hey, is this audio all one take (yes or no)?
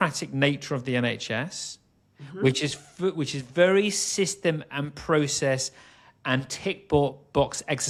yes